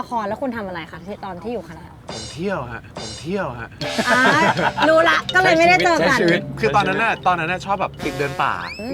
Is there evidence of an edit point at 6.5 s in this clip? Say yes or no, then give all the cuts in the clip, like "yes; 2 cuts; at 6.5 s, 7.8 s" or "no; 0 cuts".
no; 0 cuts